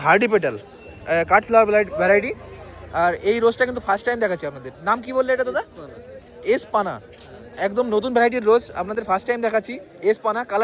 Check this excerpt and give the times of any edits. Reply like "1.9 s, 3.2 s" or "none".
none